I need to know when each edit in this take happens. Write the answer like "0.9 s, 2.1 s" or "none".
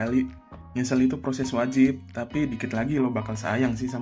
none